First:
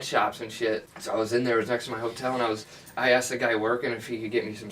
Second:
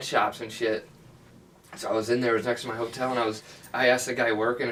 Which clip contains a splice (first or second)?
first